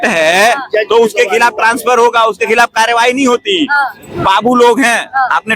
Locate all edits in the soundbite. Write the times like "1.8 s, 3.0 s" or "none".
none